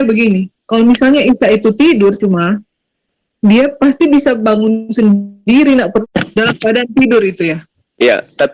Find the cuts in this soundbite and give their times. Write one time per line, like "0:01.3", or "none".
0:06.0